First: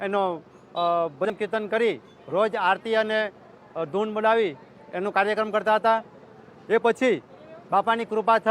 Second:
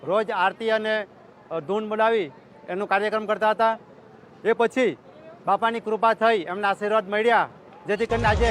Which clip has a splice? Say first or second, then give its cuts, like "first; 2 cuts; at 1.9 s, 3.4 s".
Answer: first; 1 cut; at 1.3 s